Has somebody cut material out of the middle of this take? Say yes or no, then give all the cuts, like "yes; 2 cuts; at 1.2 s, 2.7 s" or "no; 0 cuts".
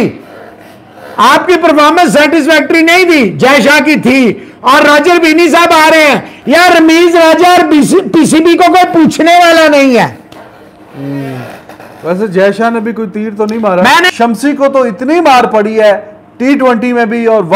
yes; 1 cut; at 14.1 s